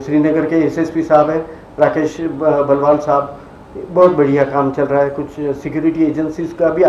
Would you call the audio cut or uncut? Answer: uncut